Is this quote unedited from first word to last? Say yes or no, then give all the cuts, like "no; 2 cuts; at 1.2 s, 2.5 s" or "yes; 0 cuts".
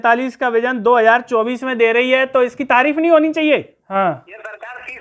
no; 1 cut; at 3.8 s